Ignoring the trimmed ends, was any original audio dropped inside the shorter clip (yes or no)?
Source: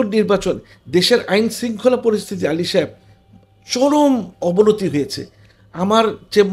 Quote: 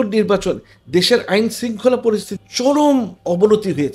yes